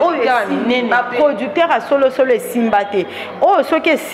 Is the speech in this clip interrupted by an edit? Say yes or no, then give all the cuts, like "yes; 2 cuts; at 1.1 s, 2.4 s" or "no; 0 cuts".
no; 0 cuts